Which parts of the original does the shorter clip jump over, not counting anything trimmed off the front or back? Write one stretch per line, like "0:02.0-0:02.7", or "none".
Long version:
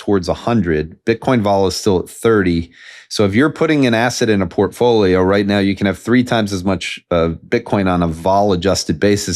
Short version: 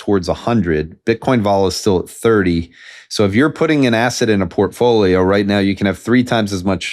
none